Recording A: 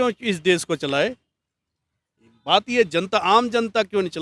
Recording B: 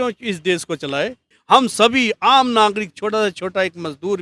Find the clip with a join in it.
B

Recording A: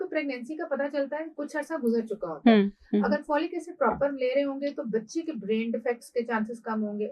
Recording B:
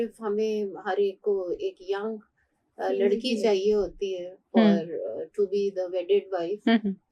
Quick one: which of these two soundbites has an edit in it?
A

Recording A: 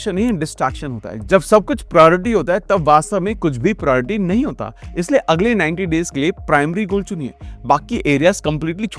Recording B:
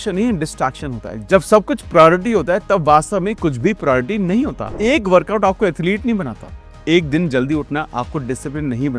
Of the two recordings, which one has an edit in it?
B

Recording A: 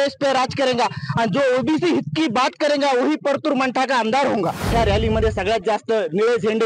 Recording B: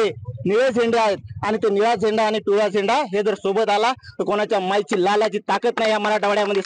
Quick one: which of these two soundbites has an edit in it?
A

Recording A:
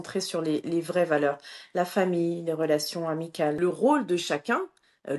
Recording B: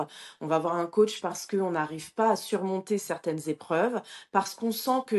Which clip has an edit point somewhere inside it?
A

